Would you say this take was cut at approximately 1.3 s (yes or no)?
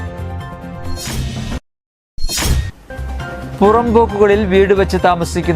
yes